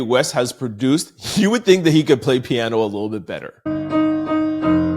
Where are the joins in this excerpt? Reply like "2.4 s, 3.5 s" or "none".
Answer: 3.7 s